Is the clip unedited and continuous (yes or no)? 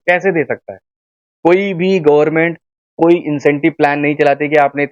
yes